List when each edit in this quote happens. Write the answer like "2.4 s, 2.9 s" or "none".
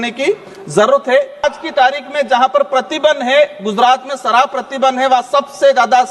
1.4 s